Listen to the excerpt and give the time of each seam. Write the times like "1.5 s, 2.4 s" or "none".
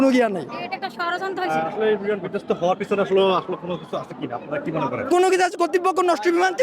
5.1 s